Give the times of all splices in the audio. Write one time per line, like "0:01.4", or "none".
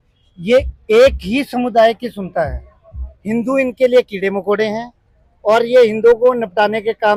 none